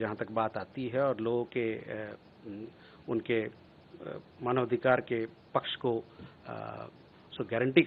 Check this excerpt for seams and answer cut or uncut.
uncut